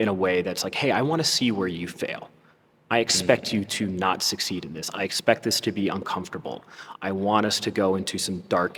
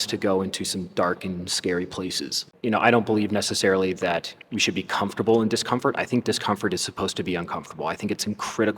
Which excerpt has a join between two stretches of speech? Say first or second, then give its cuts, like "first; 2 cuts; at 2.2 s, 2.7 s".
second; 1 cut; at 2.5 s